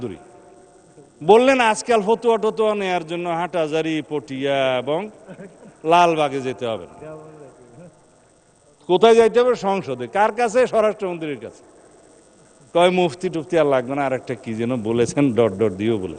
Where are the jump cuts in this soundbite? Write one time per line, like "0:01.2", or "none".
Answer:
none